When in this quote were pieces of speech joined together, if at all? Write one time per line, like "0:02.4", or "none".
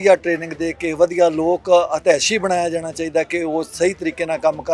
none